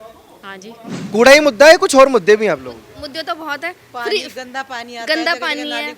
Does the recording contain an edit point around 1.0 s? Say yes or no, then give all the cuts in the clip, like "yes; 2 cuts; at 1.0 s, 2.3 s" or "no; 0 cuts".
yes; 1 cut; at 1.0 s